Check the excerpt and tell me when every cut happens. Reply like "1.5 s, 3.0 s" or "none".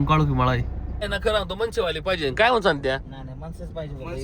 1.0 s